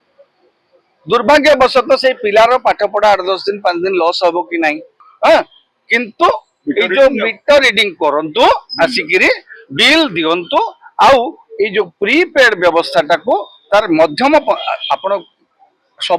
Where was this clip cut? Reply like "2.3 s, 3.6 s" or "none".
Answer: 5.0 s

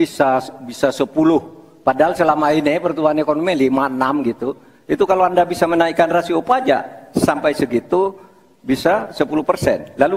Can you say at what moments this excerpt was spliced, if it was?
none

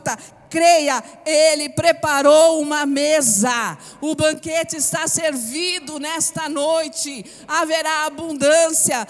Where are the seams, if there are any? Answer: none

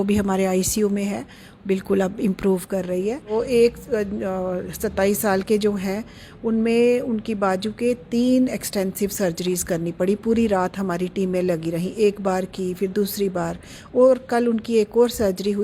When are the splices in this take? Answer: 3.3 s

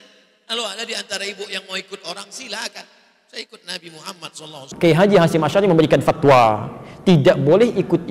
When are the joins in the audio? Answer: 4.7 s

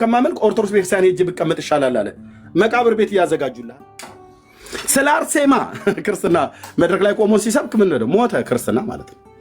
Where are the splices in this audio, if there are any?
3.6 s

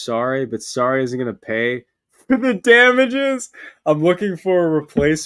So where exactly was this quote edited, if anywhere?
none

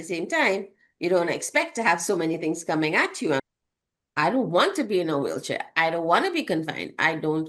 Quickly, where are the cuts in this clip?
3.4 s

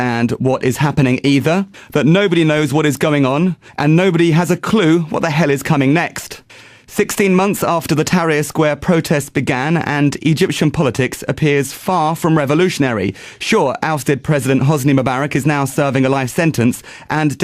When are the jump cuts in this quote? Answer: 1.4 s

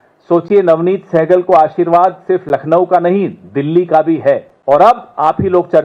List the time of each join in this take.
4.5 s

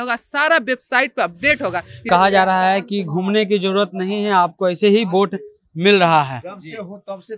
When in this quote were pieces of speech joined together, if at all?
2.0 s

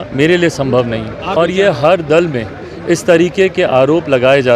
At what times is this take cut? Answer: 1.3 s

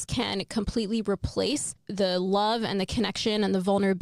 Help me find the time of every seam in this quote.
1.8 s

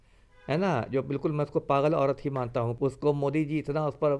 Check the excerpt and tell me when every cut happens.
2.7 s

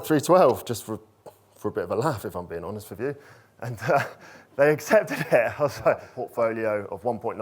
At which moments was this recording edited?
6.1 s

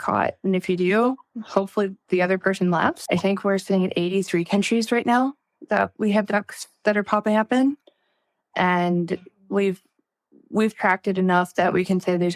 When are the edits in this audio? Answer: 3.0 s

